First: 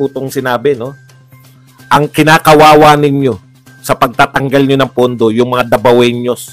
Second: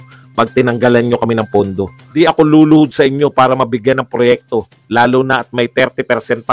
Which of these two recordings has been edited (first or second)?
second